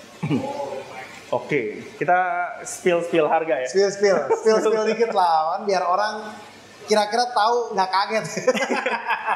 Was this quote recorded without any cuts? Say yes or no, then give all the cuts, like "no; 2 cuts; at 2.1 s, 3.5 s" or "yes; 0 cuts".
yes; 0 cuts